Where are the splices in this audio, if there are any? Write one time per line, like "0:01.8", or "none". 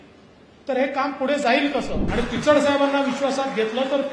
0:02.0